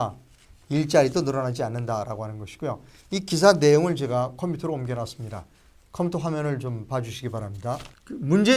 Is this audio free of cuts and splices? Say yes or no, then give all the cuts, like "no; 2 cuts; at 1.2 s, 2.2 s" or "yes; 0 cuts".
yes; 0 cuts